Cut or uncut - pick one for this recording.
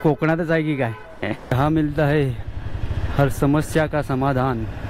cut